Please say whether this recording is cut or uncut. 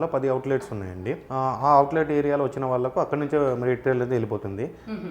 cut